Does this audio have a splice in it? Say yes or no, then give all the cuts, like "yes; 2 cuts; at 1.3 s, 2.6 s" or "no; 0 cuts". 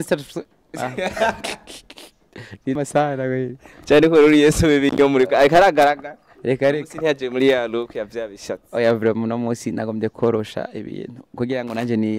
yes; 1 cut; at 2.8 s